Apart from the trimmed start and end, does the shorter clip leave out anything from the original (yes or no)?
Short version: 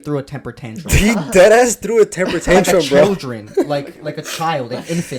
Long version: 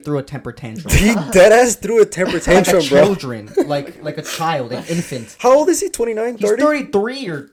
no